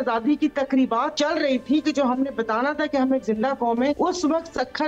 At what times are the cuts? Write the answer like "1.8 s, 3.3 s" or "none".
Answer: 1.1 s, 4.0 s